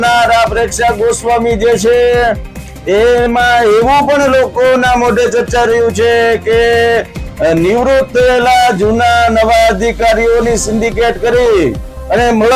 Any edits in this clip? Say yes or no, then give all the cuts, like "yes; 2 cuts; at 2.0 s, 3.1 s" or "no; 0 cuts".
no; 0 cuts